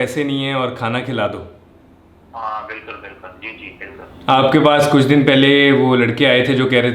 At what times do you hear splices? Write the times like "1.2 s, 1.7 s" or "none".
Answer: 4.1 s

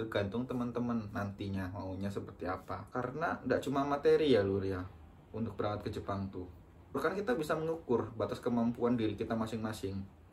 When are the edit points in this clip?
2.8 s, 7.0 s

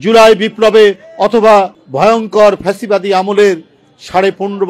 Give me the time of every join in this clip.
1.8 s

